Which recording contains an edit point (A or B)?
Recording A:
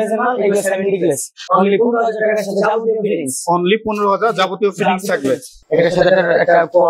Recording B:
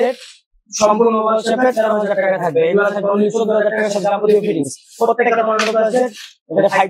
A